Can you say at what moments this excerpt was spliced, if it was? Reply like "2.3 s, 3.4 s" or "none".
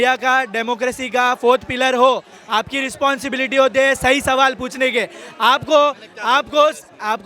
none